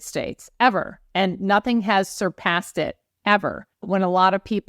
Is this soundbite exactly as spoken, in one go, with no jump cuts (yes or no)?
no